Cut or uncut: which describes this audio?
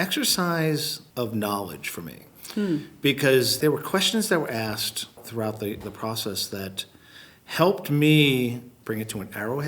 cut